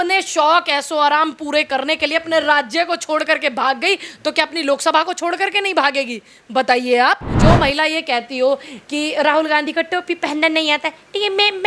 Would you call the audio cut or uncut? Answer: cut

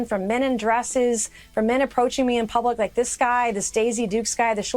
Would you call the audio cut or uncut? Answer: uncut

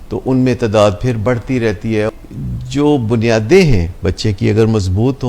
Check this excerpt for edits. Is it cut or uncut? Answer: cut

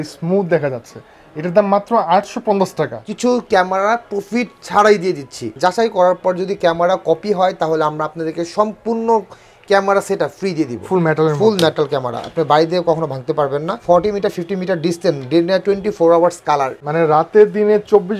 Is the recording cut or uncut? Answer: cut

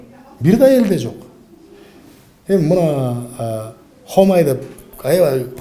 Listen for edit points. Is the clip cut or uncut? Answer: uncut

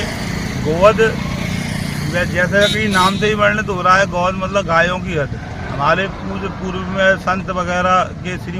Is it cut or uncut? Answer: uncut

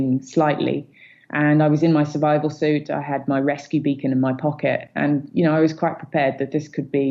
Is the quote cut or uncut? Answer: uncut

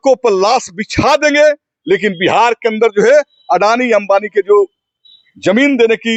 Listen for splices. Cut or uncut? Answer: uncut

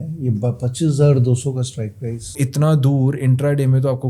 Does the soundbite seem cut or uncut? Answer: cut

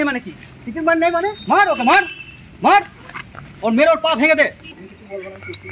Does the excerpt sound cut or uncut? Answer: cut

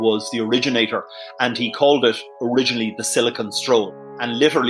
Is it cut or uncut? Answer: uncut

